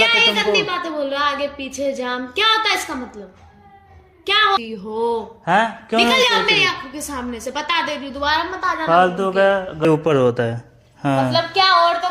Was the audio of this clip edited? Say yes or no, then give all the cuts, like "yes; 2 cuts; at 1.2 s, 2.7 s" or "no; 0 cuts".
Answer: yes; 2 cuts; at 4.6 s, 9.8 s